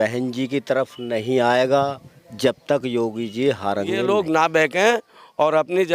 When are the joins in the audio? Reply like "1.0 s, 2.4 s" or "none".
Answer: 4.0 s

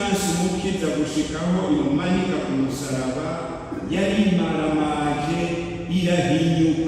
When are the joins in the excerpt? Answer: none

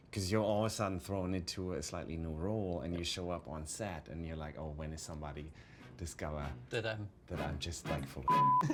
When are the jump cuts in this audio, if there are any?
none

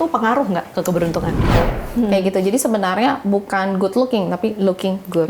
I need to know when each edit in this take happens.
1.6 s

